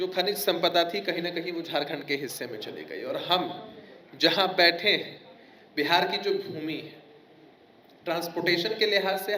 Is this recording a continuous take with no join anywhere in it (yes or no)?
yes